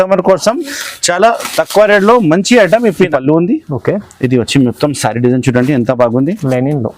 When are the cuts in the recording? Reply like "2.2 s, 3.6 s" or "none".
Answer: 3.1 s